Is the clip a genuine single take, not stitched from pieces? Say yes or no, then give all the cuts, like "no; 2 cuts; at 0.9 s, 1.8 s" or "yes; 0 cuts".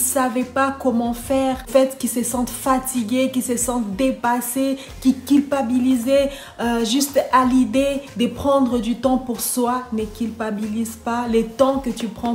no; 1 cut; at 1.7 s